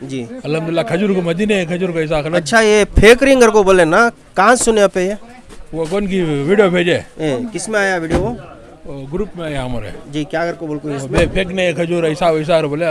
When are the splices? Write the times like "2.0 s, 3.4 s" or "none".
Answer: none